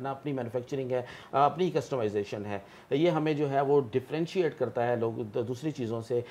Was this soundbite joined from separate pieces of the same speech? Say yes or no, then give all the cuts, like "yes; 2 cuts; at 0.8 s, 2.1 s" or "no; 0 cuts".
no; 0 cuts